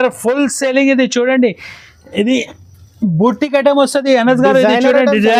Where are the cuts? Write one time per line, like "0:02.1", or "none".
none